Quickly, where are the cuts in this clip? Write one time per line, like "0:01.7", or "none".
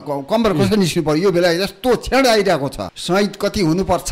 0:02.9